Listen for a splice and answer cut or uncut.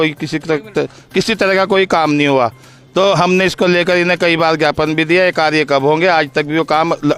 uncut